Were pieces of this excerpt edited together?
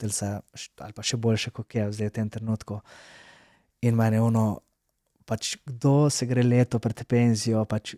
no; 0 cuts

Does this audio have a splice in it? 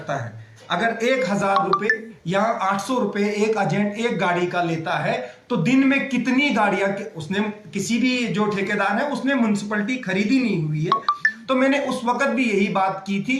no; 0 cuts

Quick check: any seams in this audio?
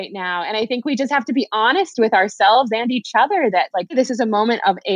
yes; 1 cut; at 3.9 s

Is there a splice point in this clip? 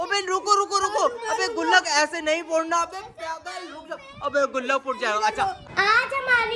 yes; 1 cut; at 5.6 s

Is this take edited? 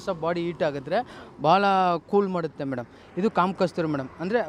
no; 0 cuts

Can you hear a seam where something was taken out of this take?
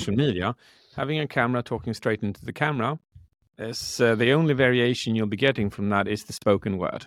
yes; 1 cut; at 0.9 s

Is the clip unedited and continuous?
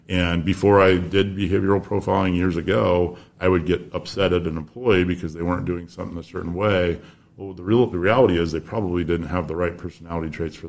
yes; 0 cuts

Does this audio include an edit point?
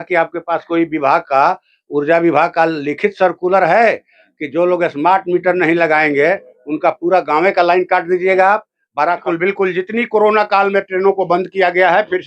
yes; 1 cut; at 9.2 s

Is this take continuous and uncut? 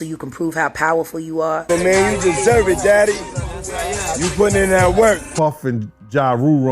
no; 2 cuts; at 1.7 s, 5.3 s

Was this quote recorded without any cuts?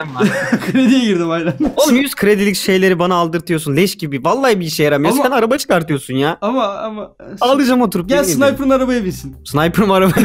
no; 2 cuts; at 1.7 s, 9.3 s

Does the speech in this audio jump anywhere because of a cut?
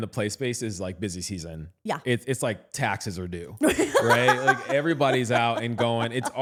no; 0 cuts

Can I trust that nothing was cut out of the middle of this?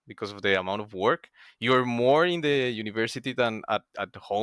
yes; 0 cuts

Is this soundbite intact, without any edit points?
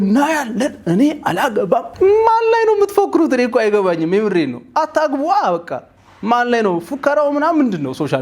yes; 0 cuts

